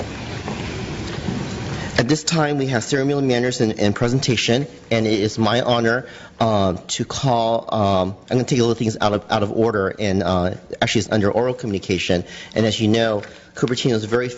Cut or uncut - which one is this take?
uncut